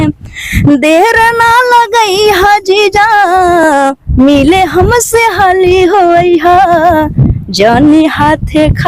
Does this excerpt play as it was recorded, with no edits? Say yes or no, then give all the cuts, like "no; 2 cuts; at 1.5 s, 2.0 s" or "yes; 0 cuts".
yes; 0 cuts